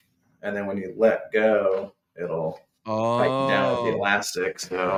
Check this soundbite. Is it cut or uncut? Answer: uncut